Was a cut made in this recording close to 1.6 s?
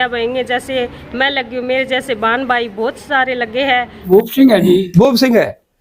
no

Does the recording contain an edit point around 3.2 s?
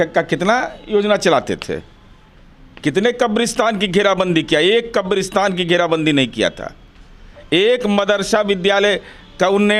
no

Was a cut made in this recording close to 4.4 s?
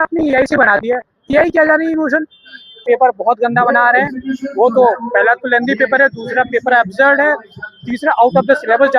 no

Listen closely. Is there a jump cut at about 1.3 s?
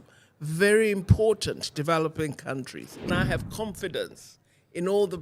no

